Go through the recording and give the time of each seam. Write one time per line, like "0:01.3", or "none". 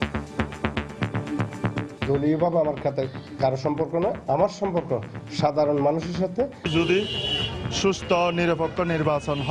0:01.9
0:06.7